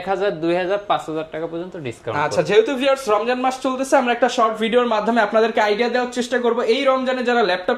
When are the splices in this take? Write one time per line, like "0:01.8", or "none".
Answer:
none

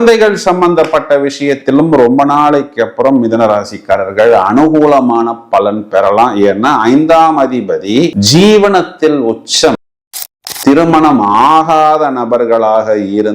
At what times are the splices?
0:09.9

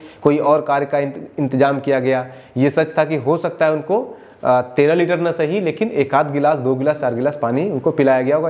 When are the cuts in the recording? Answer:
none

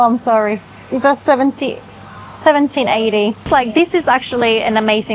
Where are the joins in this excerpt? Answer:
0:03.5

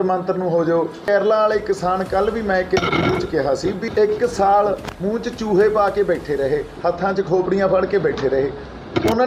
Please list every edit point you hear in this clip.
0:01.1
0:03.8
0:04.9

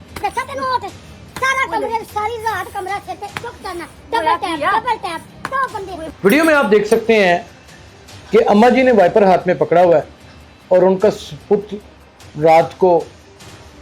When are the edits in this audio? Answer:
0:06.0

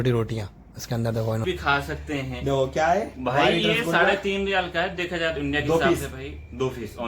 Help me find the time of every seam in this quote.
0:01.4

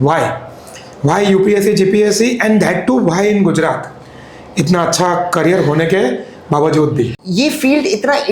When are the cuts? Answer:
0:07.2

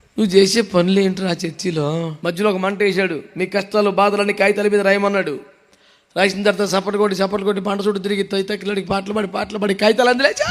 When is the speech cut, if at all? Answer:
0:02.1

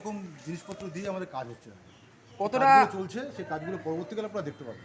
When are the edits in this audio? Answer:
none

